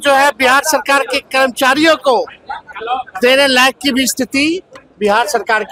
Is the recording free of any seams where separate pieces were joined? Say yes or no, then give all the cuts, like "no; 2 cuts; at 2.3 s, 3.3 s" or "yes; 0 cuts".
yes; 0 cuts